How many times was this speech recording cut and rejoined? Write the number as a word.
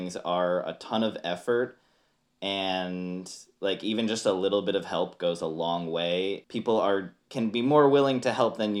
two